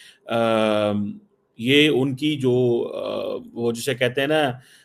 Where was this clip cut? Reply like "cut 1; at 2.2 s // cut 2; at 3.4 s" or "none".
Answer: none

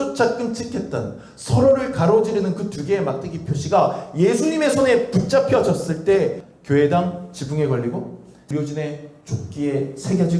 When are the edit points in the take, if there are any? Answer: cut 1; at 6.5 s // cut 2; at 8.4 s

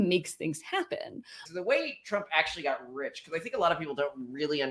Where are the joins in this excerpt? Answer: cut 1; at 1.4 s

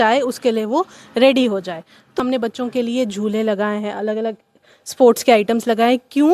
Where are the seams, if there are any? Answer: cut 1; at 2.2 s

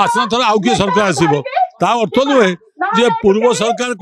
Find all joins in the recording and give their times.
none

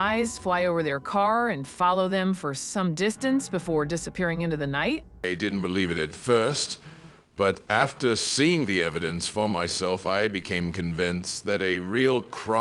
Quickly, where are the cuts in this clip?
cut 1; at 5.2 s

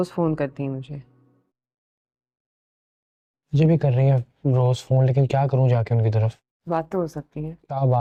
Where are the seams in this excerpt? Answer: none

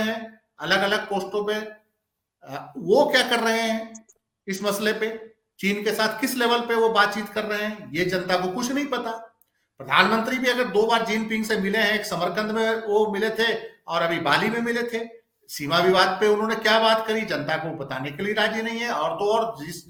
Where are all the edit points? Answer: none

